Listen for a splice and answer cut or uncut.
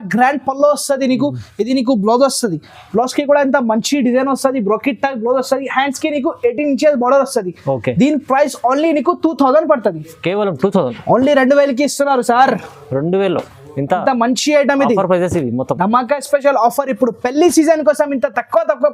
uncut